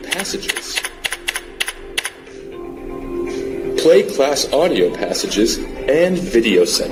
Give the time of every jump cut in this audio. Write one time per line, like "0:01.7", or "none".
none